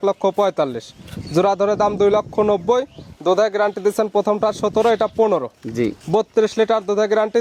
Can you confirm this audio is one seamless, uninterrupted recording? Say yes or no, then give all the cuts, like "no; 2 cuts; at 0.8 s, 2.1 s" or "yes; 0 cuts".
yes; 0 cuts